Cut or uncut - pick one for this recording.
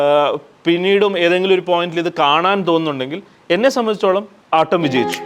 cut